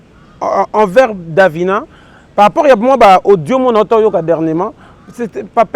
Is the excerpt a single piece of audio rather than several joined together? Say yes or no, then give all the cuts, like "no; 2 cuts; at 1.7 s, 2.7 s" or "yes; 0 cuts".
yes; 0 cuts